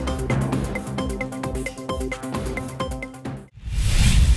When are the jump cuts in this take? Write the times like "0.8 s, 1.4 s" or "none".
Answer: 3.5 s